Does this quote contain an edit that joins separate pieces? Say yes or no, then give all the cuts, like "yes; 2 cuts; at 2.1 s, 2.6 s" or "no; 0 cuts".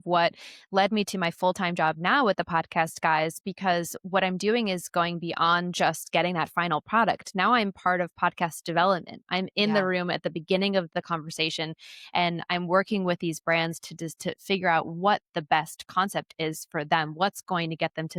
no; 0 cuts